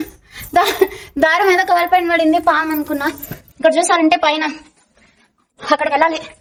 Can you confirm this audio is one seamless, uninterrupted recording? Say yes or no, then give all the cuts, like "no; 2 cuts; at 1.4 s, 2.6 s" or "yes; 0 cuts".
yes; 0 cuts